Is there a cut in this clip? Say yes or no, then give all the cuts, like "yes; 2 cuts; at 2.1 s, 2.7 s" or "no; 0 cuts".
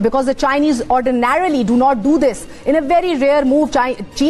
no; 0 cuts